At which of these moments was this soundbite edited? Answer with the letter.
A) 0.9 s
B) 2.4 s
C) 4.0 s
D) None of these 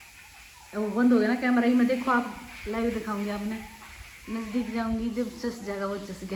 D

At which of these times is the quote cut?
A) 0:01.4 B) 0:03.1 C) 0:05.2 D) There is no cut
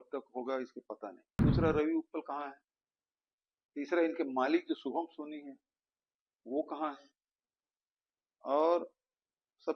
A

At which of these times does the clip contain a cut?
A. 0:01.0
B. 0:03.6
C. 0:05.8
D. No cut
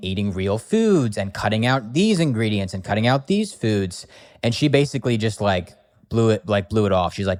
D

